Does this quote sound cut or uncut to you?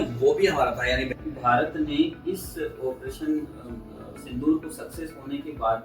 cut